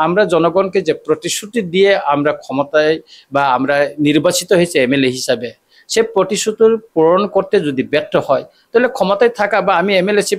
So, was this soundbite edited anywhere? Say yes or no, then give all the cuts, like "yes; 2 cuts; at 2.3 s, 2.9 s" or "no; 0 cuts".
no; 0 cuts